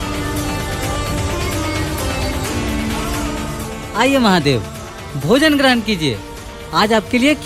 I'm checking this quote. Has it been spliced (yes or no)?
no